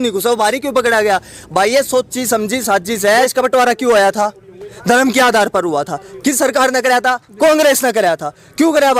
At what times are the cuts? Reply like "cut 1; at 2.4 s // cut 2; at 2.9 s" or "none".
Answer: cut 1; at 3.3 s